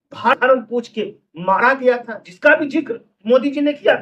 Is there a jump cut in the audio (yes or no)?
no